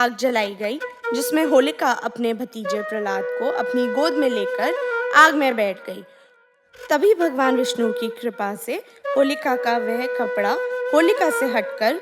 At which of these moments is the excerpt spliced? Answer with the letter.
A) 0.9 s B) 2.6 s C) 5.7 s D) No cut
D